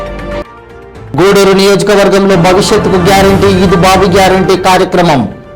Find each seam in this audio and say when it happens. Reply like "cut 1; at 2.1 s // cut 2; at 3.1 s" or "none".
cut 1; at 1.0 s